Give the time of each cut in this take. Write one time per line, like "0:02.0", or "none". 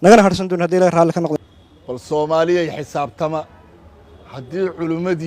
0:01.4